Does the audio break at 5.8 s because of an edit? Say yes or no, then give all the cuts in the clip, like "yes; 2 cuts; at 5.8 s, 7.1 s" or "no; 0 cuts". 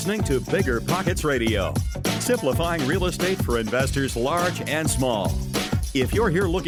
no; 0 cuts